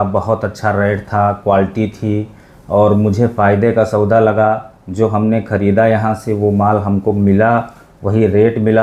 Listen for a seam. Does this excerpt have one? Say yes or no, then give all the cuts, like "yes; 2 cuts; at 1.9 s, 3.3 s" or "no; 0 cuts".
no; 0 cuts